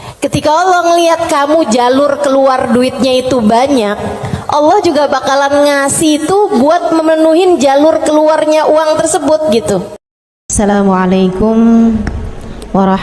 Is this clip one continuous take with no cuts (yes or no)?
no